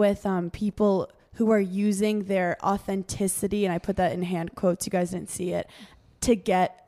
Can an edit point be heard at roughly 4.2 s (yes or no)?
no